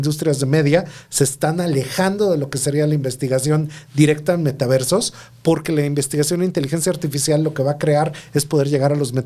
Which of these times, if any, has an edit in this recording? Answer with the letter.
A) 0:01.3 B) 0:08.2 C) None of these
C